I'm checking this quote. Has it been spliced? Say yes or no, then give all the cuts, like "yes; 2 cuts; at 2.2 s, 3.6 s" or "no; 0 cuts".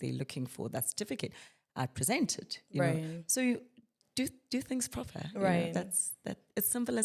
no; 0 cuts